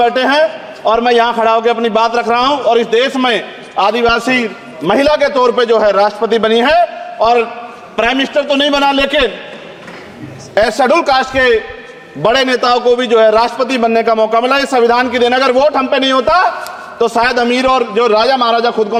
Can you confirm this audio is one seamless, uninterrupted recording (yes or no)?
yes